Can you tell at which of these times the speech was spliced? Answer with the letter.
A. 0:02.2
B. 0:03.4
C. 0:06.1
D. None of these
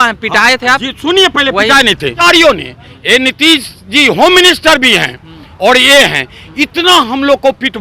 A